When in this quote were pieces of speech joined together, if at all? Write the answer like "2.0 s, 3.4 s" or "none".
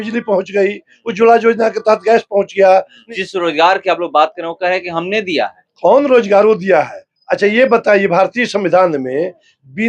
3.0 s